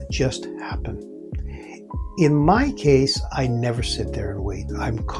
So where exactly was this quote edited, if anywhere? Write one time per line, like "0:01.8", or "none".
none